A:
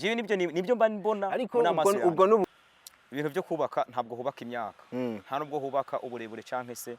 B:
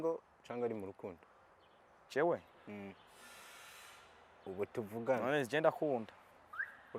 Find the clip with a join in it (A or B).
A